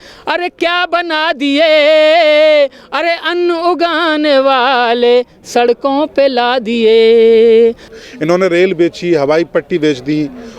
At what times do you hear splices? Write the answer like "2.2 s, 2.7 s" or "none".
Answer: 8.0 s